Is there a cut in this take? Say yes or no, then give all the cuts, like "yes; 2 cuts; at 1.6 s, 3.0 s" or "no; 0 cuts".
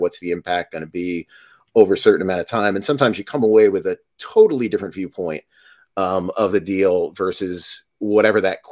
no; 0 cuts